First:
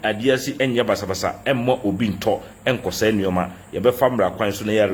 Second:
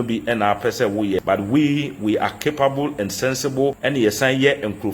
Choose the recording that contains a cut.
second; 2 cuts; at 1.2 s, 3.8 s

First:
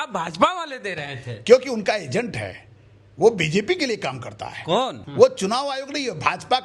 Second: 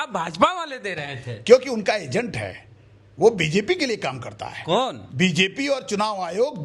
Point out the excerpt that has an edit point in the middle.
first; 1 cut; at 5.0 s

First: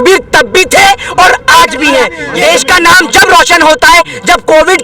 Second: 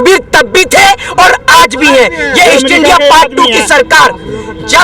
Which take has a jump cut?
first; 1 cut; at 2.2 s

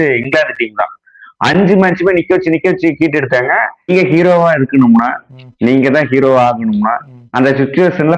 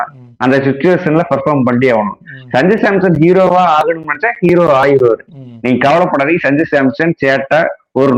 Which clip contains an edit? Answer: first; 1 cut; at 3.9 s

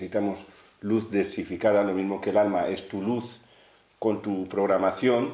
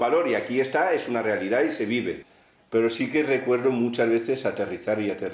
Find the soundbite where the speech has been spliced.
second; 1 cut; at 2.2 s

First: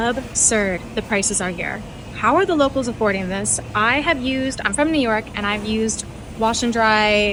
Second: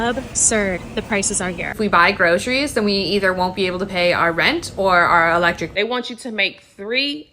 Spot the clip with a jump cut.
second; 2 cuts; at 1.8 s, 5.7 s

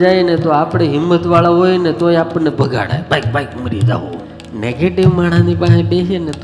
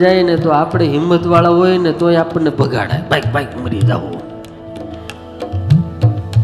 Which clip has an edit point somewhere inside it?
first; 1 cut; at 4.4 s

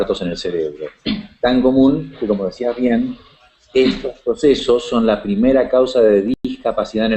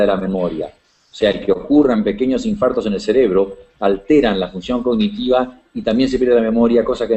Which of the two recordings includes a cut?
second; 1 cut; at 6.2 s

